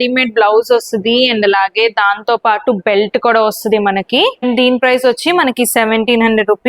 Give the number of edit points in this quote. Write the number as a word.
one